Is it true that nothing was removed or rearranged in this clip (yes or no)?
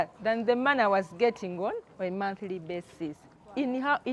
yes